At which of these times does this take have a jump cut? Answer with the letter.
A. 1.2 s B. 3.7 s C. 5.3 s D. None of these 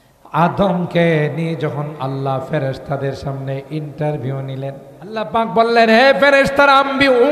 C